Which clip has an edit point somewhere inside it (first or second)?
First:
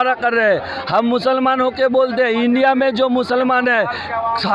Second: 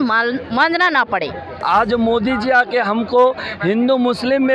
second